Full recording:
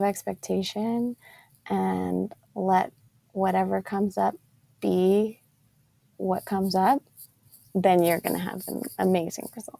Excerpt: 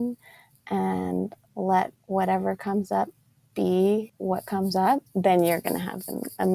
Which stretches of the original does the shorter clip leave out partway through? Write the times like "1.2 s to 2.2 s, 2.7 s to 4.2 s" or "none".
3.0 s to 3.2 s, 5.4 s to 6.1 s, 7.1 s to 7.7 s